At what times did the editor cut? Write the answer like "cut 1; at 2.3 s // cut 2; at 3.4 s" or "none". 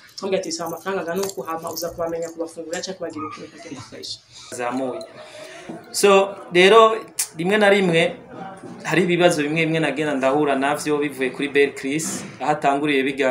cut 1; at 4.5 s